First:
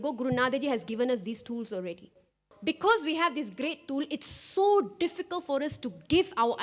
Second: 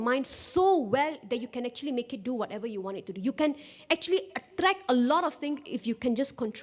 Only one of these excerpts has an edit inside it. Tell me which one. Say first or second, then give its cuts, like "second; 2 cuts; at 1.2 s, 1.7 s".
first; 1 cut; at 2.4 s